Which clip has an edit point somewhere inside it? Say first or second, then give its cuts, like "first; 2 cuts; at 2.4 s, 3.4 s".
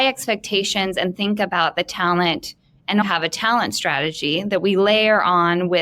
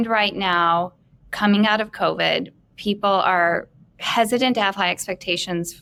first; 1 cut; at 3.0 s